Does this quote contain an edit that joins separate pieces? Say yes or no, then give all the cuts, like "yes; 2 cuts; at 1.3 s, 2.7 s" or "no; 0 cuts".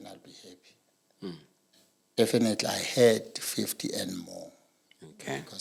no; 0 cuts